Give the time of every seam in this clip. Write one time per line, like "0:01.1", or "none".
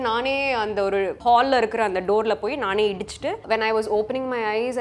0:01.2
0:03.4